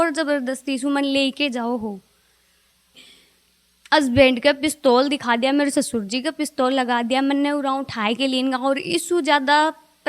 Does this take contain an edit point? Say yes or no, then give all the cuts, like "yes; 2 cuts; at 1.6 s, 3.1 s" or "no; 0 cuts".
yes; 1 cut; at 3.1 s